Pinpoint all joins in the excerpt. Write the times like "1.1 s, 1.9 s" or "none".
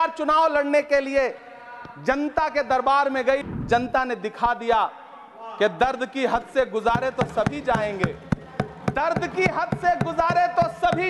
3.4 s